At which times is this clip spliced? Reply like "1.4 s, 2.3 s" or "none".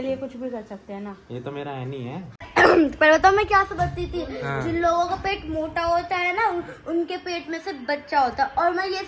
2.5 s

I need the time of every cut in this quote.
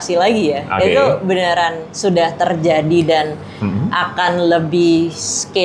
none

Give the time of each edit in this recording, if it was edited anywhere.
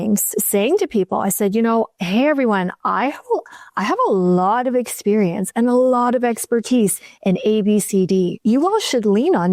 none

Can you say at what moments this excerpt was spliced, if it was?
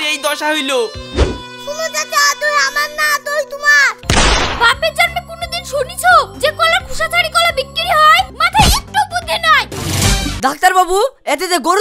4.0 s, 8.3 s, 9.8 s

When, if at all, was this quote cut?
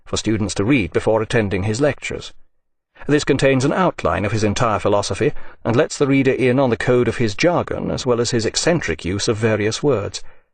1.7 s

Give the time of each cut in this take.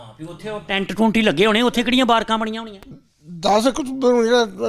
2.9 s

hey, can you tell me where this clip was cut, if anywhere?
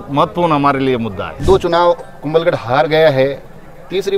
1.4 s

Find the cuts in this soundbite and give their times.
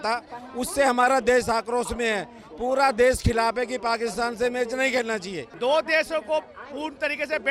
5.4 s

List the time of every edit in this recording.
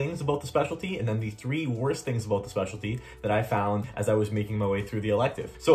none

